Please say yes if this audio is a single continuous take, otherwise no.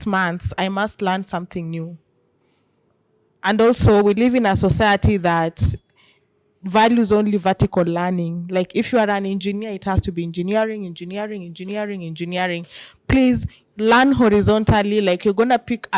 yes